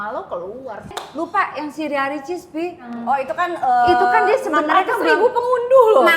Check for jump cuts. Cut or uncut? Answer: cut